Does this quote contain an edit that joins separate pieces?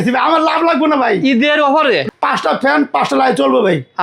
yes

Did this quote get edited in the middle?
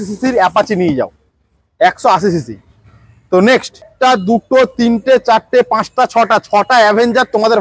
yes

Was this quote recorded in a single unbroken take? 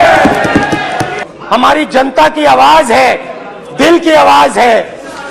no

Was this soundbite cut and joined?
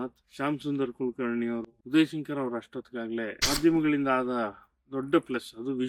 yes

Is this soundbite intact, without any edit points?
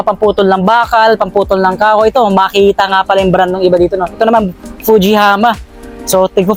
yes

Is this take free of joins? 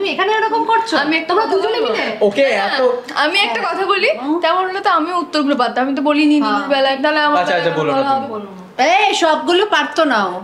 yes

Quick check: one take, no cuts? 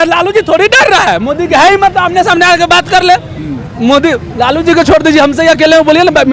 yes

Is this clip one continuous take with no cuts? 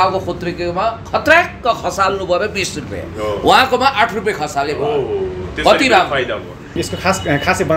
no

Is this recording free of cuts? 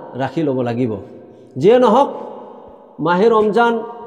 yes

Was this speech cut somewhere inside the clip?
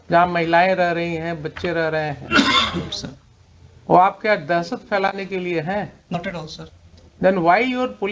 no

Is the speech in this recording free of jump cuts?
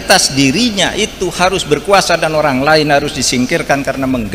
yes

